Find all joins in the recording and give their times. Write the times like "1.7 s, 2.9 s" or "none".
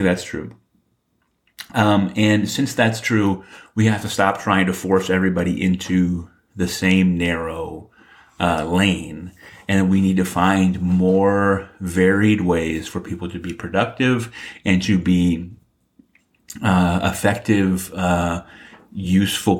15.6 s